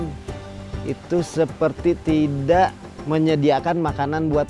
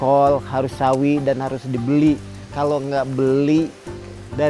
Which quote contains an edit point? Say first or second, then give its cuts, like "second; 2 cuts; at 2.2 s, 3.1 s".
second; 1 cut; at 2.5 s